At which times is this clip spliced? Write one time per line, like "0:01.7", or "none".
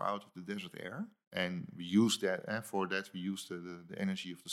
0:01.2